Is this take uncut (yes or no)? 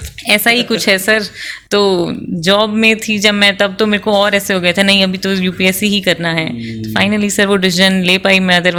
yes